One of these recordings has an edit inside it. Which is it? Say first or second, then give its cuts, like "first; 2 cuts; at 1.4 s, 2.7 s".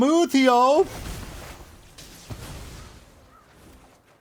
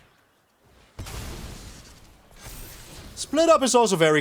first; 1 cut; at 1.8 s